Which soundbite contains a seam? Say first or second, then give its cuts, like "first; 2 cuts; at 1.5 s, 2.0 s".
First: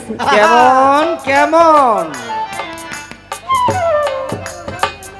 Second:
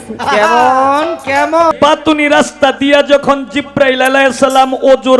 second; 1 cut; at 1.7 s